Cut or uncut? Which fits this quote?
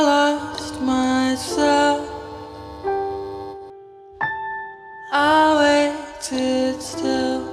uncut